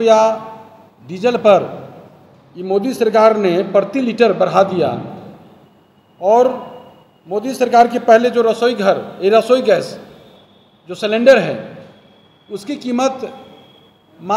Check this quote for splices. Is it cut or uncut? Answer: uncut